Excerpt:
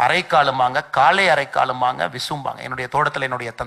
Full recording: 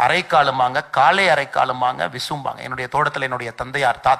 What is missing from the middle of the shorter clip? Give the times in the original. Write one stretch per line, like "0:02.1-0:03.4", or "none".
none